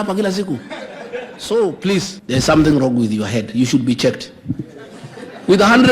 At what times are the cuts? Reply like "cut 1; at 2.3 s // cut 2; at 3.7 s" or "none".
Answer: cut 1; at 2.2 s